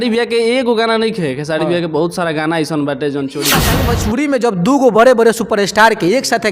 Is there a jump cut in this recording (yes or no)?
yes